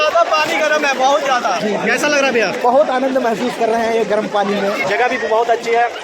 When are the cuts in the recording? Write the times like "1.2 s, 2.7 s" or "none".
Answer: 1.6 s, 4.8 s